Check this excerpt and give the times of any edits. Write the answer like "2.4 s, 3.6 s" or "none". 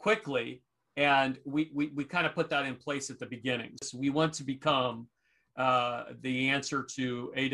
3.8 s